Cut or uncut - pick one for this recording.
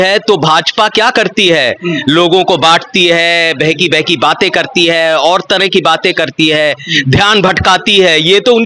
uncut